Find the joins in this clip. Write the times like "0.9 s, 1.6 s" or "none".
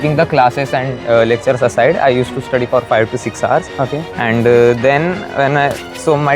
none